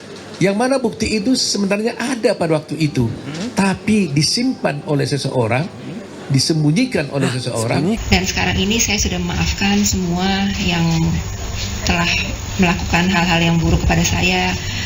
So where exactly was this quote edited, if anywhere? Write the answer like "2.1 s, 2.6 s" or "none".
8.0 s